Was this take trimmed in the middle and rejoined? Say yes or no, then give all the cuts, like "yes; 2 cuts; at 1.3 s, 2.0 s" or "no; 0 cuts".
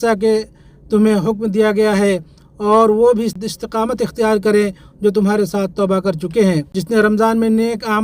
yes; 2 cuts; at 3.3 s, 6.7 s